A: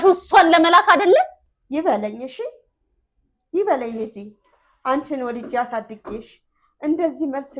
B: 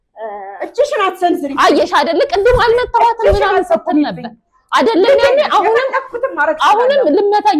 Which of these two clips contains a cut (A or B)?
A